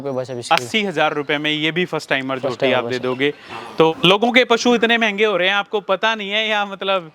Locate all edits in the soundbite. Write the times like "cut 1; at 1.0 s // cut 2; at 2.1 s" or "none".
cut 1; at 4.0 s